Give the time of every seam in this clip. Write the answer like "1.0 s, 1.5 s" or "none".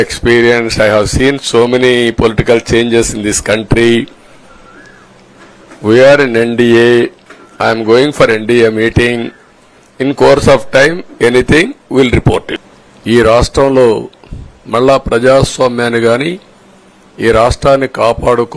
12.5 s

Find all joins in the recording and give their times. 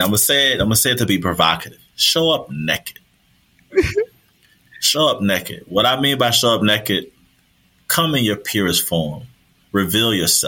none

